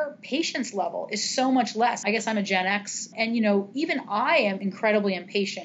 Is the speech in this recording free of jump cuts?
no; 3 cuts; at 2.0 s, 3.1 s, 4.6 s

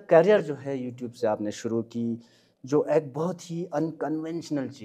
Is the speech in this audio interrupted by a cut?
no; 0 cuts

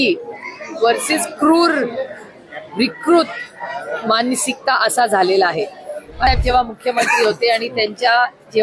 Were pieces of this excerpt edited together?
yes; 1 cut; at 6.3 s

